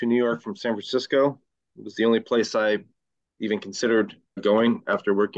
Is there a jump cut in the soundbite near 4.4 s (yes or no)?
yes